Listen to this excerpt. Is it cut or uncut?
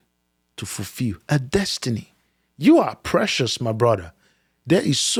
uncut